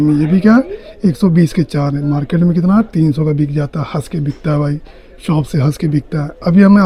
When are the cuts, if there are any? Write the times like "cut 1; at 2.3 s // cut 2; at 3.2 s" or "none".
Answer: none